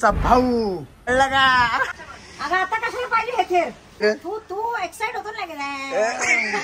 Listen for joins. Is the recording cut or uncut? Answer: cut